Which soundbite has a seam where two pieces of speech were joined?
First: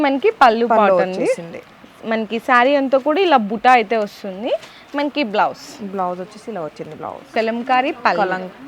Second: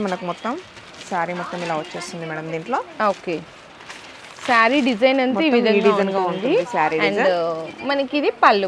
first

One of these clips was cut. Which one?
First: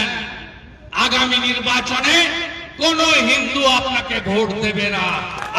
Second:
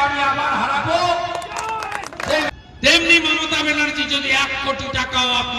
second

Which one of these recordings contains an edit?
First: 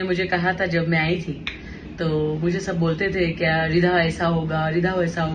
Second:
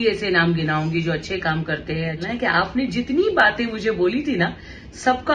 second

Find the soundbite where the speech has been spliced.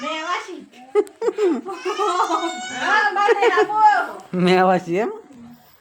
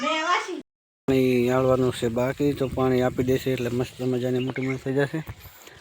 second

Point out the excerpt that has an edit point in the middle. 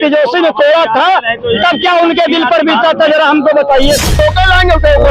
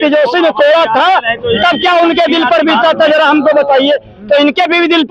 first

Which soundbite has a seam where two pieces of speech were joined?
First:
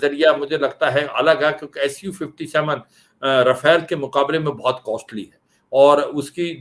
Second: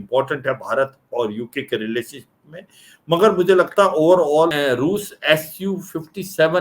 second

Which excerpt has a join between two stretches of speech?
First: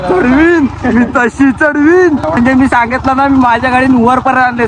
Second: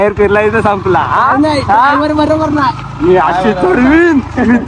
first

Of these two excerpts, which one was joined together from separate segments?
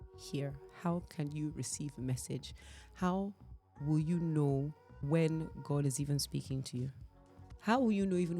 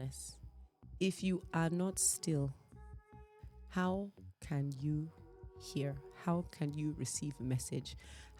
first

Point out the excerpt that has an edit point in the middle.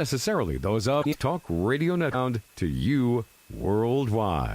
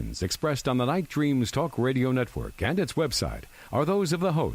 first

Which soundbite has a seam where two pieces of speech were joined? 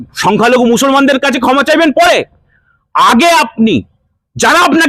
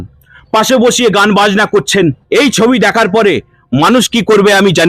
second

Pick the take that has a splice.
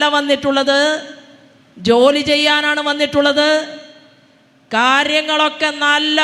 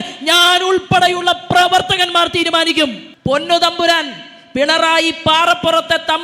second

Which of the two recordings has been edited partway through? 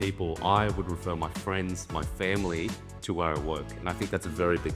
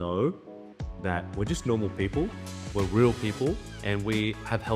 second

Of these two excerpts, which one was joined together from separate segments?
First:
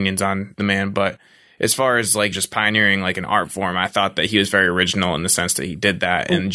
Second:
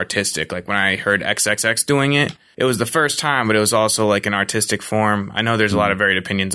first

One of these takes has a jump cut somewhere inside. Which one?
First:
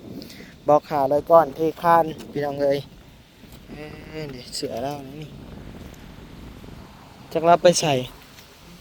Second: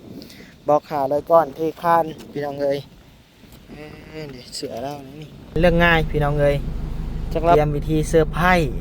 second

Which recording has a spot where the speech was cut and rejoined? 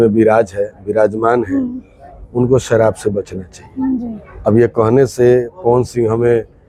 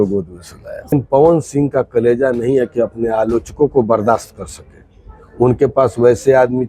second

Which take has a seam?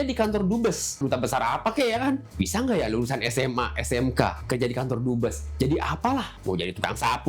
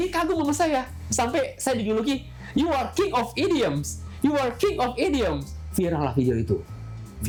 first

